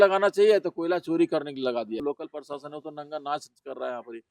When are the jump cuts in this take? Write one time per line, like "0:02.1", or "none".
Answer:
0:02.0